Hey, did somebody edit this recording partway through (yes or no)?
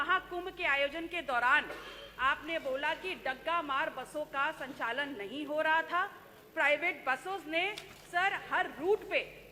no